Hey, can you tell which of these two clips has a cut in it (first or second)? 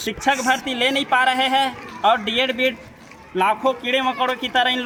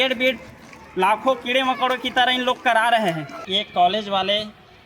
second